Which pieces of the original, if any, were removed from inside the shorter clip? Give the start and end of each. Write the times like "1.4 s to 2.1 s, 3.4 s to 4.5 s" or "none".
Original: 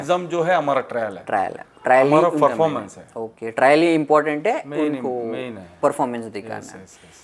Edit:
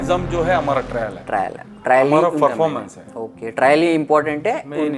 none